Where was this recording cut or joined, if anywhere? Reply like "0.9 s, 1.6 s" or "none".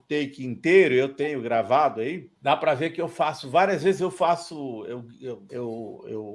2.3 s, 5.4 s